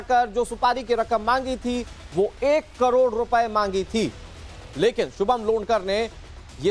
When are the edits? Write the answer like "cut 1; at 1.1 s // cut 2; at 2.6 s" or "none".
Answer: cut 1; at 2.7 s